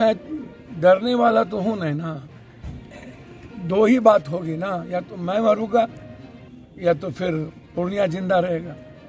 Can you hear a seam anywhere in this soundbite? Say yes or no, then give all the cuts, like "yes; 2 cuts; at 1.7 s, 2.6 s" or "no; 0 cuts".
no; 0 cuts